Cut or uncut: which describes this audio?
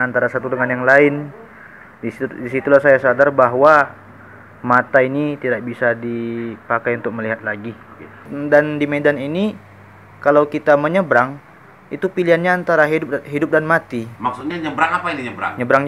cut